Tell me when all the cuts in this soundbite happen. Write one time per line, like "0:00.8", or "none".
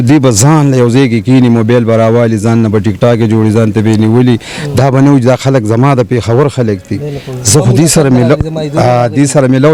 none